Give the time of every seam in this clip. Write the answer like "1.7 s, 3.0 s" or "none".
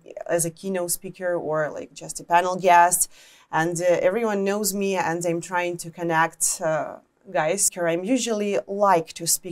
7.7 s